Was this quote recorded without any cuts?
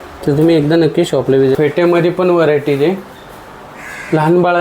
no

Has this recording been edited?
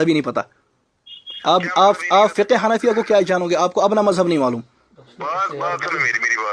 no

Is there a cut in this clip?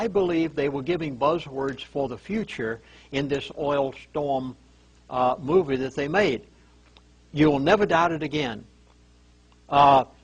yes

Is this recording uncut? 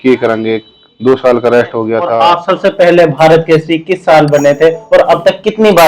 no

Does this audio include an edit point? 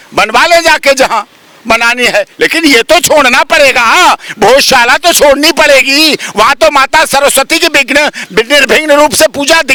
no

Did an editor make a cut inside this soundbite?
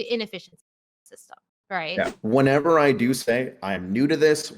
yes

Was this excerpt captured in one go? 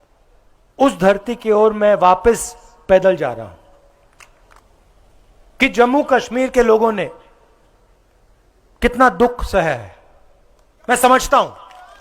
no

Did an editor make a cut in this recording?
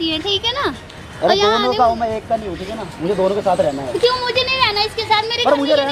no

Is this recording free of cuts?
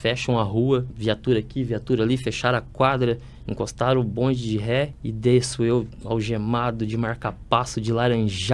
no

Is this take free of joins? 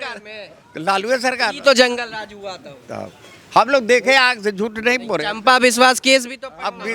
yes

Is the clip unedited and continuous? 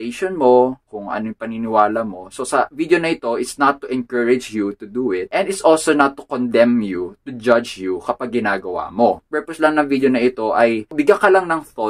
no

